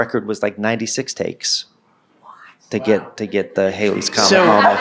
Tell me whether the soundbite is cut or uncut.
uncut